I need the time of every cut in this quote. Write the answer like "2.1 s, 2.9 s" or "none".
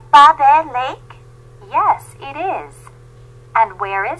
2.2 s